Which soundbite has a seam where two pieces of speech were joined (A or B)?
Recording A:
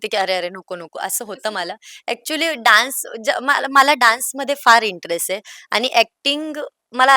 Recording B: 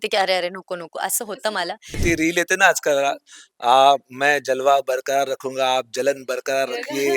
B